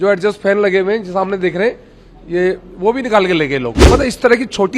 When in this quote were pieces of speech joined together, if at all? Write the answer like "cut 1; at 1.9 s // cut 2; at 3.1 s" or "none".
cut 1; at 3.8 s